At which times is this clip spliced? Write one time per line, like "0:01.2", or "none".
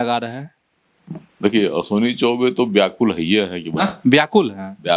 none